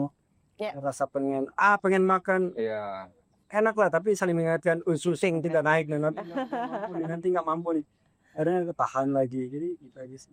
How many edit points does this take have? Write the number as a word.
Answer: zero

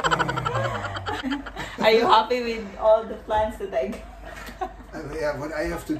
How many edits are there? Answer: one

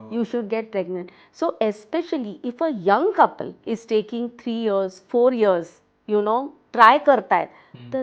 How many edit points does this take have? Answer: one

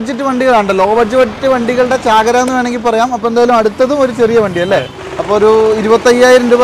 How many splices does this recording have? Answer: one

